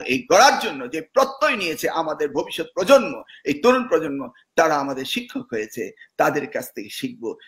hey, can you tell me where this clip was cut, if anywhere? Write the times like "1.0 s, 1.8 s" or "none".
none